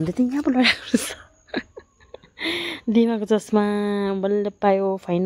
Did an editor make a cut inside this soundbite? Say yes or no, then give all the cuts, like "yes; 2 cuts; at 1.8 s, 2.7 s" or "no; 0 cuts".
no; 0 cuts